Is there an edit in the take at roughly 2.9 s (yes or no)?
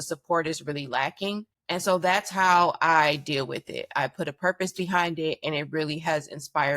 no